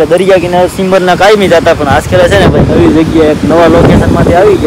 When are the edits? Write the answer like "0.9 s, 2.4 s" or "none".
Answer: none